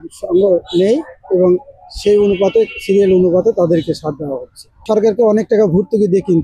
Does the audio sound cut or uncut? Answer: cut